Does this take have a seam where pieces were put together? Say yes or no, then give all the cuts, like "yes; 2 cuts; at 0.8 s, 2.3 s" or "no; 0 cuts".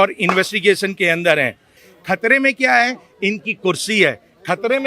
yes; 1 cut; at 1.9 s